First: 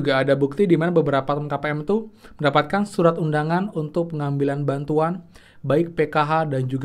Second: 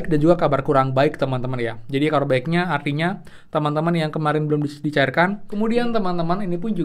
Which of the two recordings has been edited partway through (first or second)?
second